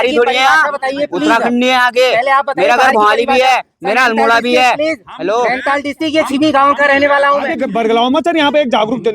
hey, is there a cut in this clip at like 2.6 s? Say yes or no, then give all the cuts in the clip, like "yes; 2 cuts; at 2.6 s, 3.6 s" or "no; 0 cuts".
no; 1 cut; at 7.6 s